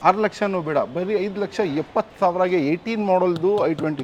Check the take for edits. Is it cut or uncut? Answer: uncut